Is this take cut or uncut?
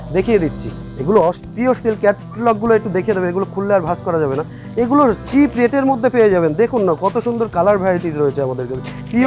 cut